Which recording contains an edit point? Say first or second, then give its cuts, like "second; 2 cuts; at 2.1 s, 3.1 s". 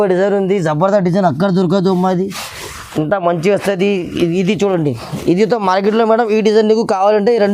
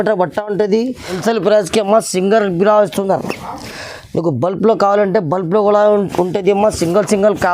second; 1 cut; at 1.2 s